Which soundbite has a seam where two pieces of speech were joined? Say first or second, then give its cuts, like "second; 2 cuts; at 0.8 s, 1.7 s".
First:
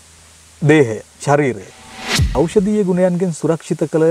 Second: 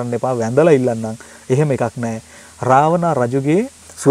first; 1 cut; at 2.3 s